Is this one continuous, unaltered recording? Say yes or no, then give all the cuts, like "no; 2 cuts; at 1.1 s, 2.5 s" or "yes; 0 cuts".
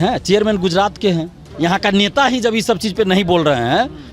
no; 1 cut; at 1.5 s